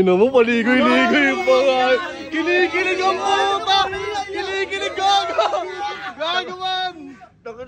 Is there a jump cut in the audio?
no; 0 cuts

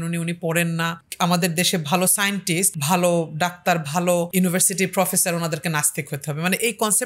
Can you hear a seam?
yes; 3 cuts; at 1.0 s, 2.7 s, 4.3 s

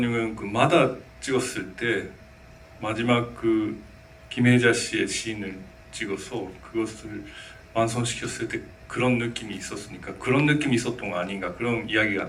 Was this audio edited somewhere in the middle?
no; 0 cuts

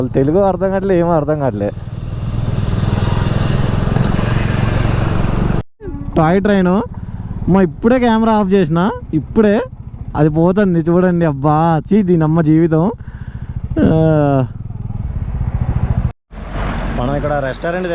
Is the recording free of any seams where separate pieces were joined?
no; 2 cuts; at 5.8 s, 16.2 s

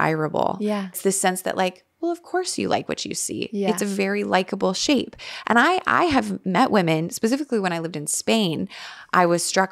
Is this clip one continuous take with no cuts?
no; 1 cut; at 0.9 s

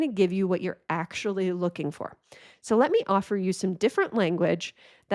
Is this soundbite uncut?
yes; 0 cuts

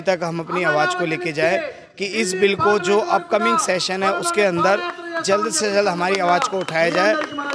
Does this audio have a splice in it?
no; 0 cuts

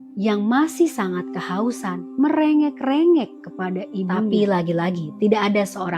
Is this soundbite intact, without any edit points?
no; 1 cut; at 4.3 s

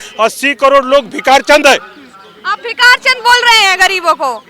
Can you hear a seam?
no; 0 cuts

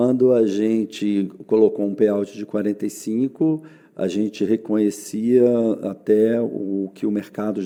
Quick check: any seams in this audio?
no; 0 cuts

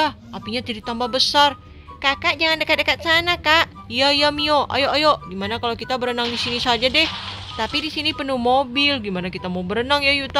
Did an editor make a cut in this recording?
no; 0 cuts

